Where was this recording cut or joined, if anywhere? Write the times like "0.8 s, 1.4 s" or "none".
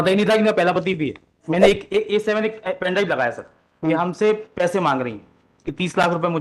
1.4 s